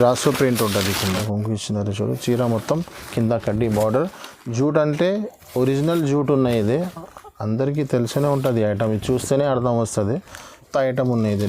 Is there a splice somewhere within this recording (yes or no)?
yes